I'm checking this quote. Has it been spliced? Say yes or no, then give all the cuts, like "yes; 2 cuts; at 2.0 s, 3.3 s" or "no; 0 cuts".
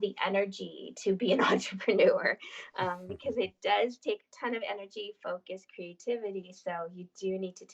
no; 0 cuts